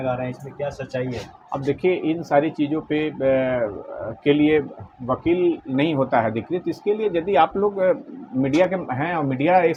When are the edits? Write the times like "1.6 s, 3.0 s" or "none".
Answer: none